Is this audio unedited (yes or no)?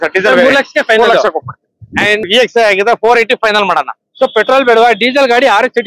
no